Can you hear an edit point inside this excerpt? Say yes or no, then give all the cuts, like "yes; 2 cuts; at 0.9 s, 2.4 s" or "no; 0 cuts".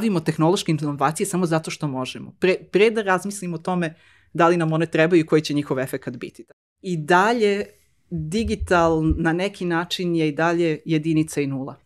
yes; 1 cut; at 6.5 s